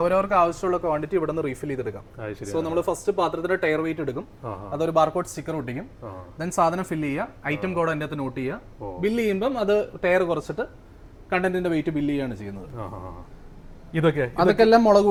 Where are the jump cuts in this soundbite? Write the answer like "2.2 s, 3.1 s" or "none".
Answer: none